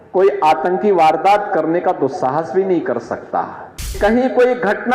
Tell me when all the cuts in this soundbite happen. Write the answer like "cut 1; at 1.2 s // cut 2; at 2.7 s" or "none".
cut 1; at 3.9 s